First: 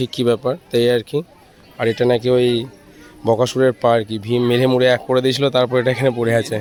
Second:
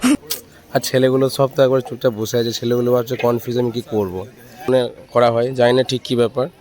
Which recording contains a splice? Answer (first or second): second